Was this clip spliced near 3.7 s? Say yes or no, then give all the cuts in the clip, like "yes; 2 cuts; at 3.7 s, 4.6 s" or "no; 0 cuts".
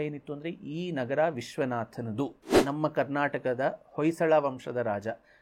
no; 1 cut; at 2.5 s